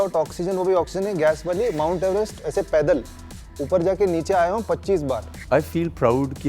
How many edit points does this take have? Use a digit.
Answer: 1